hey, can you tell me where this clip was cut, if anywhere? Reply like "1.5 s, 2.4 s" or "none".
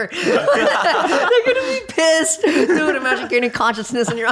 1.3 s